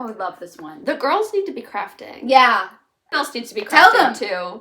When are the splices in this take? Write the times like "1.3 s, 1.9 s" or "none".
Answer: 3.1 s